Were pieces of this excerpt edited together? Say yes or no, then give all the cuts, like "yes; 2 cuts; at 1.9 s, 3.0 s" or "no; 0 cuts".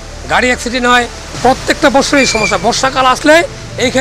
no; 0 cuts